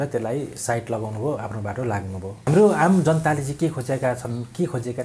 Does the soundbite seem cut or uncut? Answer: cut